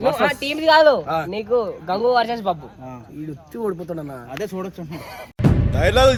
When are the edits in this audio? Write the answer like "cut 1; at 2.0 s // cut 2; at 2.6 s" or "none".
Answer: none